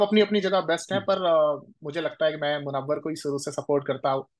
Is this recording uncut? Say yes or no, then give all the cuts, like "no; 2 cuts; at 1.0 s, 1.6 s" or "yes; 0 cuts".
yes; 0 cuts